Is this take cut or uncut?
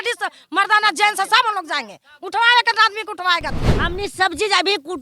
cut